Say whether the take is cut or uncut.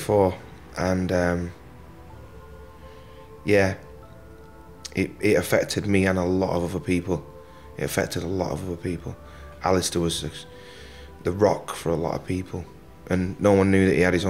uncut